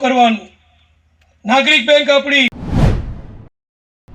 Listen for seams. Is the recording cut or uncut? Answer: cut